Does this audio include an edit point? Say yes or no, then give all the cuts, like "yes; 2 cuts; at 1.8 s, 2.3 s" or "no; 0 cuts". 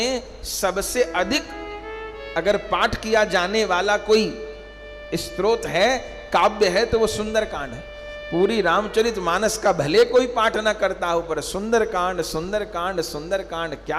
no; 0 cuts